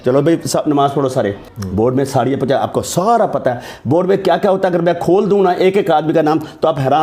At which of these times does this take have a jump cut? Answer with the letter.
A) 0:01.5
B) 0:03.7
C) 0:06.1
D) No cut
A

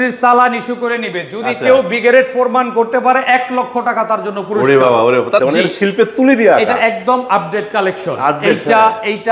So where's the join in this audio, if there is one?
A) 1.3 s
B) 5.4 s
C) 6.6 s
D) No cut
B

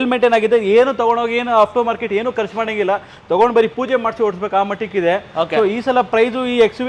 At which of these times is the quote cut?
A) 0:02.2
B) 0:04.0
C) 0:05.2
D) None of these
D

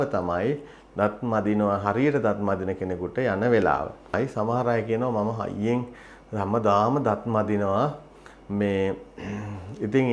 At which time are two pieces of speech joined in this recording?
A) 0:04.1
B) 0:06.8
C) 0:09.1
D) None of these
A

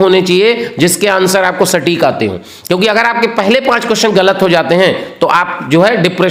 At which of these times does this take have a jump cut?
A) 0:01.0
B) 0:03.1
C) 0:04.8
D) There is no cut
D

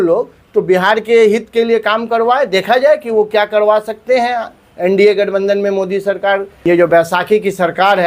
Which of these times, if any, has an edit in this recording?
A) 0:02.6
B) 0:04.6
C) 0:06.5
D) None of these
C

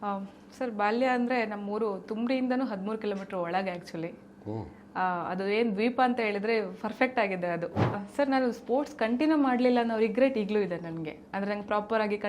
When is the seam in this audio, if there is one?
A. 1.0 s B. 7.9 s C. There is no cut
B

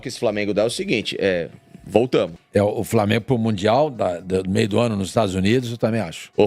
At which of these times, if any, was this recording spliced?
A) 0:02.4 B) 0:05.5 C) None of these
A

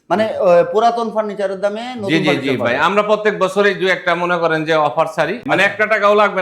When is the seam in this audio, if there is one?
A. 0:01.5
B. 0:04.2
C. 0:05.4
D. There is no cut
C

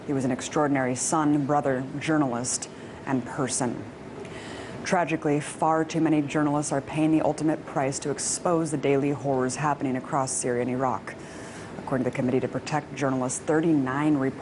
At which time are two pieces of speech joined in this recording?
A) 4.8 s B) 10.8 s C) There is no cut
C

